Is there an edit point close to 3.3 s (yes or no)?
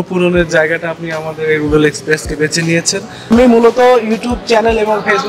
yes